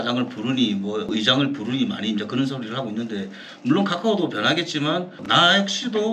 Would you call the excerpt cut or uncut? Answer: cut